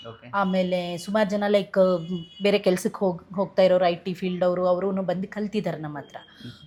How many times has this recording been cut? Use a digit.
0